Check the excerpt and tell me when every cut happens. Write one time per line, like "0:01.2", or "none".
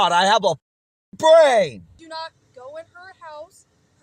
0:02.0